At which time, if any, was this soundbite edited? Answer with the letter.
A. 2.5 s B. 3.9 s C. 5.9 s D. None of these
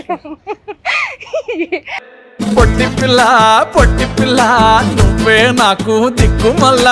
D